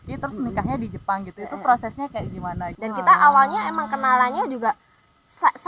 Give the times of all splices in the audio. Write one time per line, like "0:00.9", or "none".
0:02.7